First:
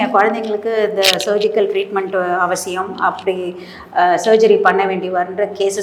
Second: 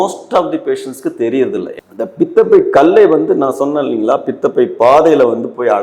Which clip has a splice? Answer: second; 1 cut; at 1.8 s

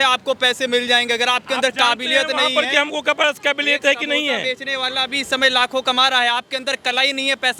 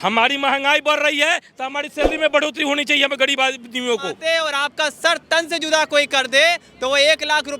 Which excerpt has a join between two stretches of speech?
second; 1 cut; at 4.2 s

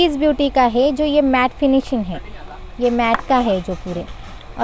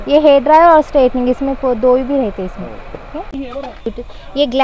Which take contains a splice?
second; 1 cut; at 3.3 s

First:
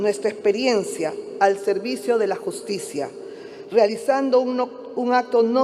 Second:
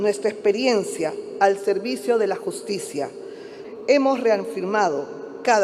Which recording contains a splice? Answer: second; 1 cut; at 3.5 s

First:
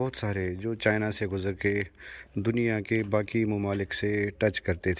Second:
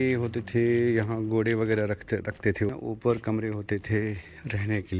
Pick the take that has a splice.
second; 1 cut; at 2.7 s

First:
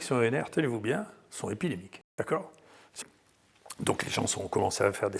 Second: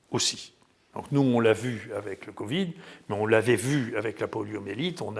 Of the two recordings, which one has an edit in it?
first; 2 cuts; at 2.0 s, 2.8 s

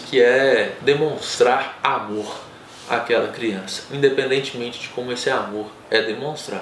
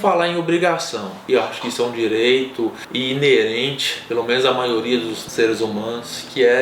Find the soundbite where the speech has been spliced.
second; 2 cuts; at 1.1 s, 5.2 s

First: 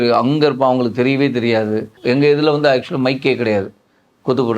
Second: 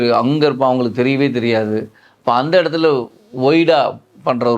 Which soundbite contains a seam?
first; 1 cut; at 2.0 s

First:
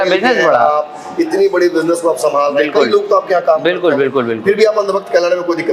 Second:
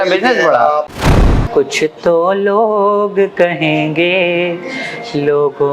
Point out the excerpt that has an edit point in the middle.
second; 1 cut; at 1.0 s

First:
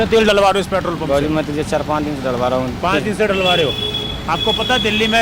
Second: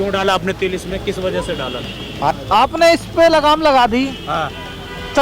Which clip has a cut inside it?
second; 1 cut; at 2.3 s

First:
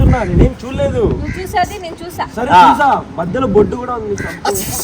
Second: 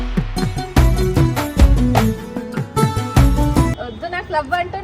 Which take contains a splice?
second; 1 cut; at 3.7 s

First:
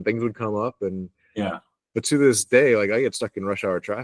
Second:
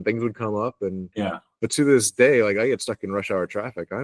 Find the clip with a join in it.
second; 1 cut; at 1.3 s

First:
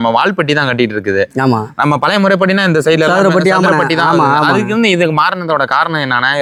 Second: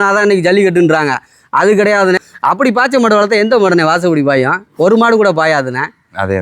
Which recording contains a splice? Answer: second; 1 cut; at 2.2 s

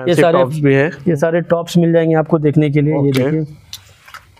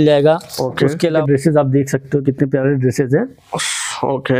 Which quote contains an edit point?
second; 1 cut; at 1.2 s

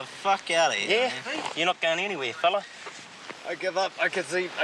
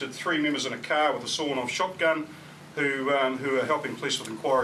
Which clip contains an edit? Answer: first; 1 cut; at 2.6 s

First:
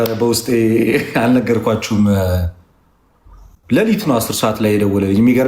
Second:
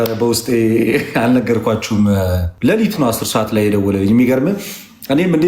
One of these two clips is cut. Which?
second; 1 cut; at 2.5 s

